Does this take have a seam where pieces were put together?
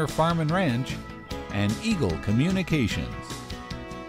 yes; 1 cut; at 3.0 s

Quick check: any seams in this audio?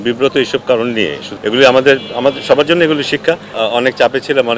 yes; 2 cuts; at 1.2 s, 3.5 s

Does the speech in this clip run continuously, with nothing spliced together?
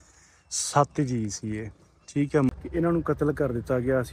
no; 1 cut; at 2.5 s

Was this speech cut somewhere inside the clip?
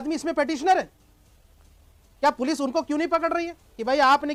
no; 0 cuts

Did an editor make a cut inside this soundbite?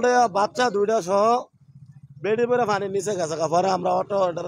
no; 0 cuts

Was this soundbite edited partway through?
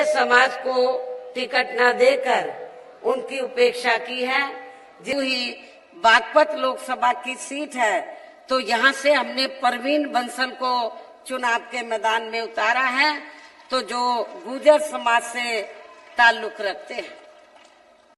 yes; 1 cut; at 5.1 s

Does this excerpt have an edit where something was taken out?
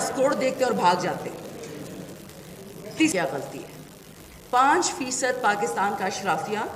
yes; 1 cut; at 3.1 s

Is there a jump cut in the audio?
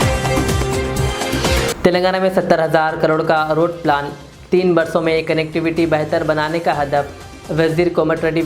yes; 1 cut; at 1.7 s

